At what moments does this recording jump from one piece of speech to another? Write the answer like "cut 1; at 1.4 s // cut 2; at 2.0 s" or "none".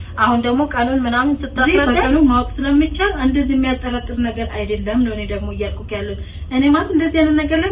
cut 1; at 1.6 s